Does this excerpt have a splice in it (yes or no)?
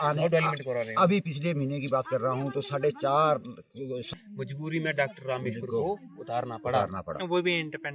yes